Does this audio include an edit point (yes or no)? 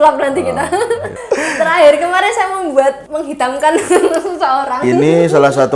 yes